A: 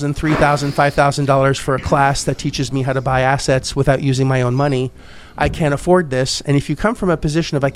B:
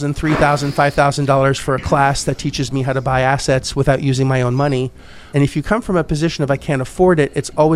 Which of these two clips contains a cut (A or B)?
B